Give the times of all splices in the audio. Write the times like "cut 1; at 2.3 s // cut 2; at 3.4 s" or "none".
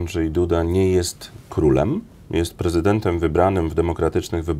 none